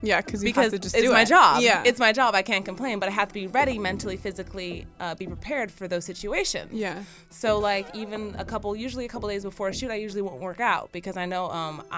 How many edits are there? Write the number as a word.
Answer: zero